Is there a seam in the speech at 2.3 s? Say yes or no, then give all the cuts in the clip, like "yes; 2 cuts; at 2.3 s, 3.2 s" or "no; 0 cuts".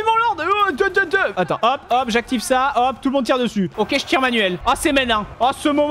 no; 1 cut; at 3.7 s